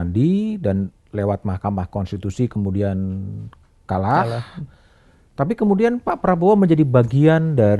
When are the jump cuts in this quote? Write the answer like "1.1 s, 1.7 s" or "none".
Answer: none